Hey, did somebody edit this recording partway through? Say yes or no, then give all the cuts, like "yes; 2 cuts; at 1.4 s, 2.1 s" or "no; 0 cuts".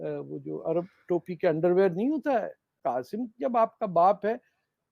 yes; 1 cut; at 2.8 s